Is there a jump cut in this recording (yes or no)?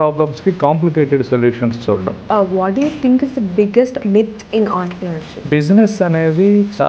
yes